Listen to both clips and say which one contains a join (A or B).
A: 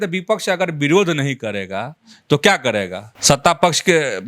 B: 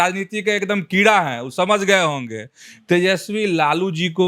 A